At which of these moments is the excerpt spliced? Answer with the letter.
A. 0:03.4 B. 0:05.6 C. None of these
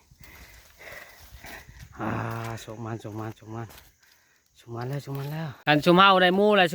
B